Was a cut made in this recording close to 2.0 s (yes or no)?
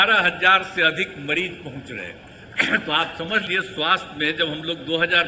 no